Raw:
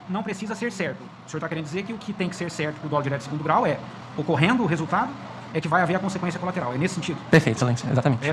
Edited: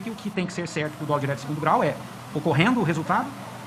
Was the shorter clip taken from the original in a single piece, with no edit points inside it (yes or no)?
yes